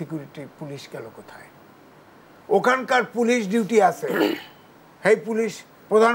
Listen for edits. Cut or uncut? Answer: uncut